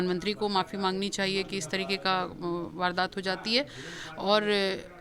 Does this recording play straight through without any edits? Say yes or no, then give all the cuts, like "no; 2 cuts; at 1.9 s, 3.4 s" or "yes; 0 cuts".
yes; 0 cuts